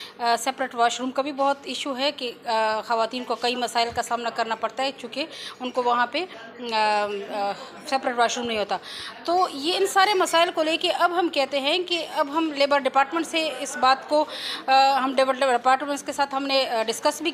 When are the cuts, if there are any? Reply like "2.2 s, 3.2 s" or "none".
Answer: none

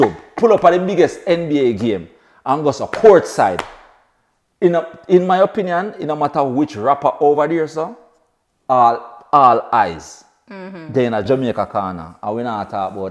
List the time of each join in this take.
11.3 s

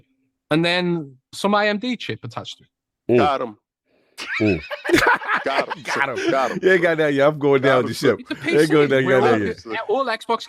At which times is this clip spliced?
3.2 s

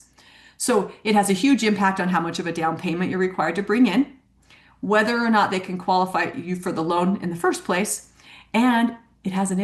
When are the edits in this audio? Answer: none

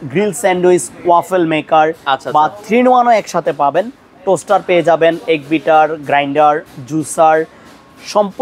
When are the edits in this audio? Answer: none

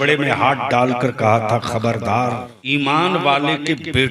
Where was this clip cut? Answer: 2.5 s

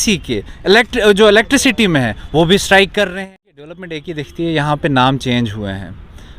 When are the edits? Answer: 3.1 s

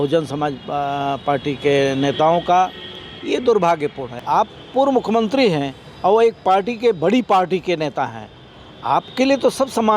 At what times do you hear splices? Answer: 4.1 s

